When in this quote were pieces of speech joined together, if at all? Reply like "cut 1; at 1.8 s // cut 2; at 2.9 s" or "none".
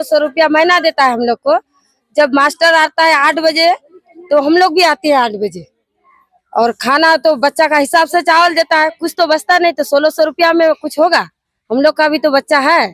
none

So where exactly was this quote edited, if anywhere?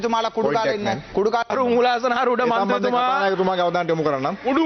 cut 1; at 1.5 s

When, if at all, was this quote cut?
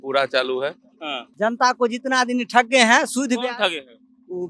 cut 1; at 1.2 s

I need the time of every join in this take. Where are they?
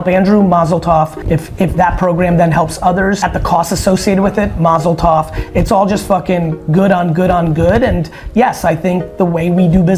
cut 1; at 1.2 s // cut 2; at 3.2 s

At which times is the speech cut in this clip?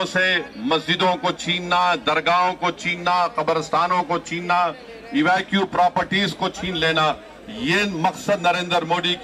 none

